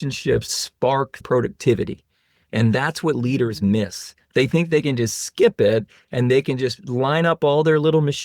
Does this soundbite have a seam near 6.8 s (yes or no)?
no